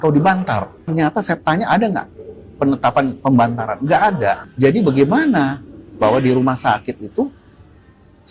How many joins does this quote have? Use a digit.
2